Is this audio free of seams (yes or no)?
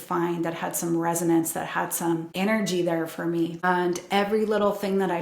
no